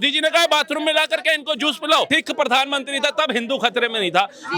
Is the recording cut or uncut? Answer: cut